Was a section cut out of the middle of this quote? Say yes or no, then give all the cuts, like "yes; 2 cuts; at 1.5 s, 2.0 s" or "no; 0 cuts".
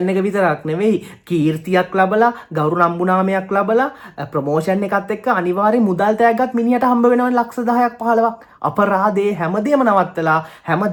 no; 0 cuts